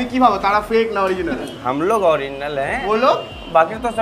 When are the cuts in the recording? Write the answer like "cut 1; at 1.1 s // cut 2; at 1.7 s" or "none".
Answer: cut 1; at 1.5 s